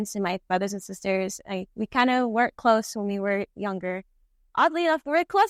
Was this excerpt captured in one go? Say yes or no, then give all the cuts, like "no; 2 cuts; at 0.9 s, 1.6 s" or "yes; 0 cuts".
yes; 0 cuts